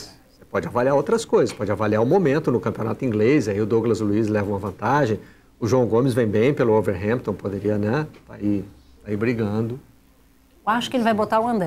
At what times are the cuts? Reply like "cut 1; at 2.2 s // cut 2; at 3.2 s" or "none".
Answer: none